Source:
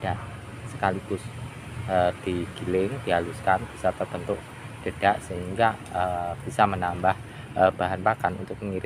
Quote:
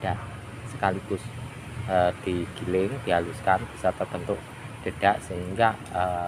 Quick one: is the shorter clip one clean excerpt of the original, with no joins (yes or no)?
yes